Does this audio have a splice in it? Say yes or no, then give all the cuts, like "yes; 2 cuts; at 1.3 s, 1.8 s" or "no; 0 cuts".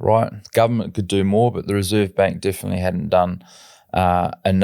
no; 0 cuts